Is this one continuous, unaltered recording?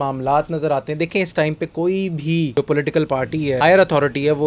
no; 2 cuts; at 2.5 s, 3.6 s

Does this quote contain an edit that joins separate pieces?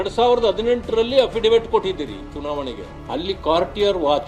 no; 0 cuts

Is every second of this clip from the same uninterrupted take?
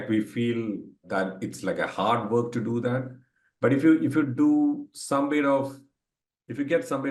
no; 1 cut; at 0.9 s

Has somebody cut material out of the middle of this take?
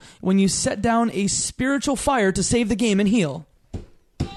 no; 0 cuts

